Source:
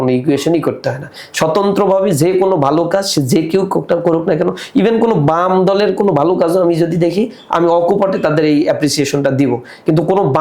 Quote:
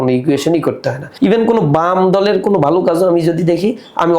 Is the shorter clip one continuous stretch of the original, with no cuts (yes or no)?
no